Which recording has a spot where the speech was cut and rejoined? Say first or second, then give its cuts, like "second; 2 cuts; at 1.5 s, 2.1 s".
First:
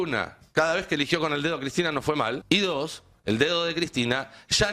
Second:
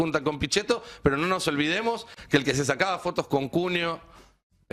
first; 1 cut; at 2.4 s